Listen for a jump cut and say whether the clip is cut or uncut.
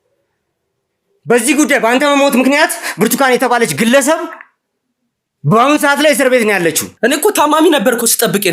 cut